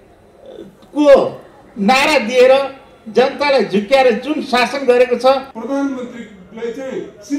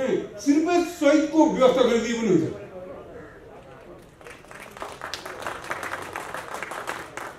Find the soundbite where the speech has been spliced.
first; 1 cut; at 5.5 s

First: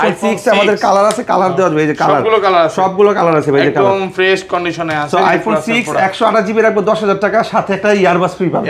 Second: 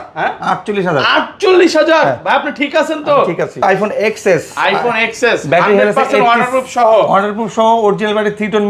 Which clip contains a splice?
second; 1 cut; at 3.6 s

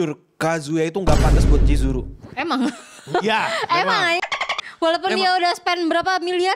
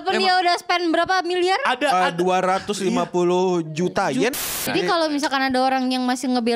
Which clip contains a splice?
second; 1 cut; at 4.3 s

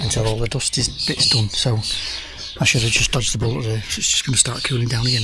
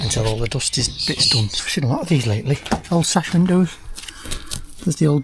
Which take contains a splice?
second; 1 cut; at 1.6 s

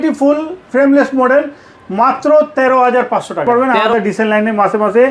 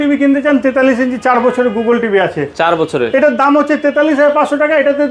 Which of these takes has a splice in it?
first; 1 cut; at 3.8 s

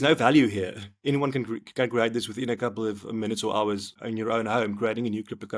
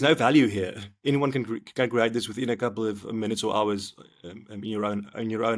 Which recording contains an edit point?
first; 1 cut; at 4.0 s

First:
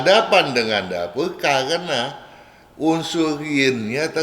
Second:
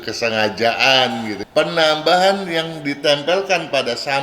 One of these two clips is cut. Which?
second; 1 cut; at 1.3 s

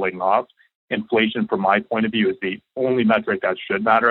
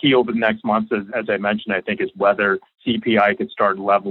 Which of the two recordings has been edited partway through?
second; 2 cuts; at 1.1 s, 2.7 s

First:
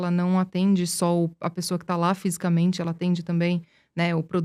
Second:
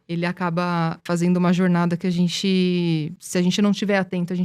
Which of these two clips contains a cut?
second; 2 cuts; at 1.0 s, 3.2 s

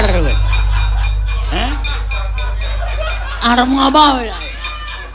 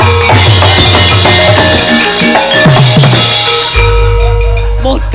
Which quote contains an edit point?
second; 1 cut; at 4.0 s

